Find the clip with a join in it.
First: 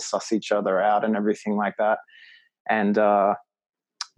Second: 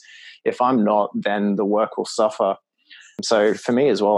second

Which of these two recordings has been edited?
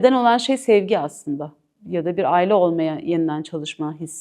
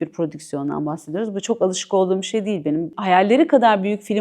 second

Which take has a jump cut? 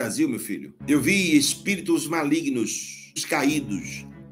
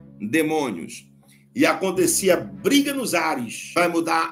first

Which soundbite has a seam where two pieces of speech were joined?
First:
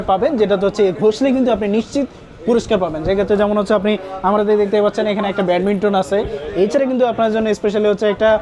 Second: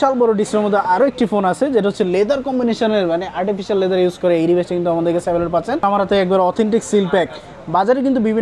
second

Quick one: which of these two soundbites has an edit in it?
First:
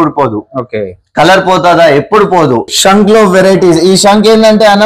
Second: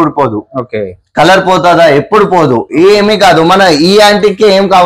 first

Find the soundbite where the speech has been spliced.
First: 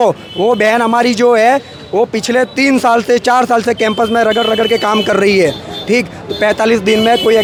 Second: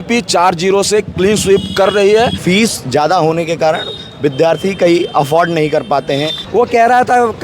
second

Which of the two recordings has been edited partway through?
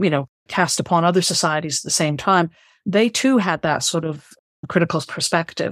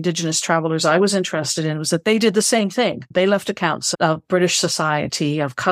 second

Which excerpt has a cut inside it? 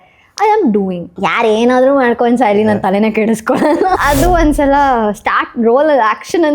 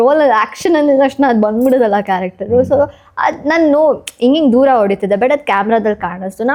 first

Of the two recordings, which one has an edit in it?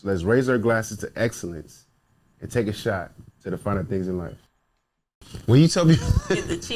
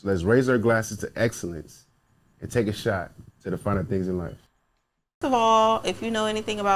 second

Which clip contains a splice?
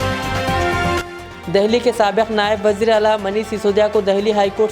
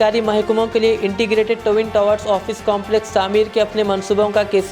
first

